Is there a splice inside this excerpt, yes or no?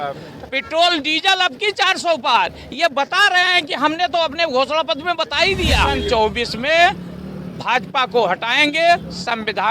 yes